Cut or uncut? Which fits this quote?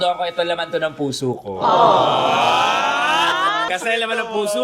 cut